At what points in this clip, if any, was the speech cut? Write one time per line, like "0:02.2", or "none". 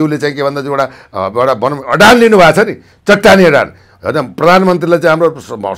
none